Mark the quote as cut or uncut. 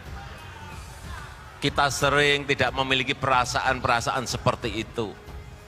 uncut